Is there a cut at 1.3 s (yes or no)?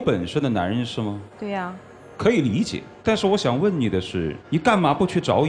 yes